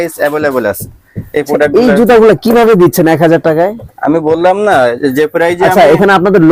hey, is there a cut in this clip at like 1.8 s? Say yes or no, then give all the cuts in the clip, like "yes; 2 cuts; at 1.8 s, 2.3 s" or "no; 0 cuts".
no; 0 cuts